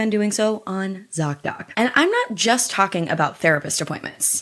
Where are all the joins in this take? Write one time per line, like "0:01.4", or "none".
0:01.7